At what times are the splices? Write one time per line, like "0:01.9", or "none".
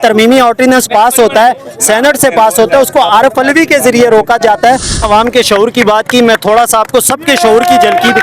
0:05.0